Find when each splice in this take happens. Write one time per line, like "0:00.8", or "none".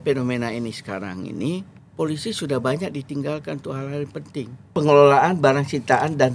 0:01.8
0:04.7